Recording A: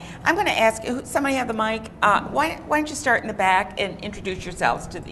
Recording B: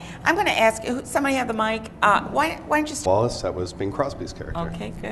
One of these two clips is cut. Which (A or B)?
A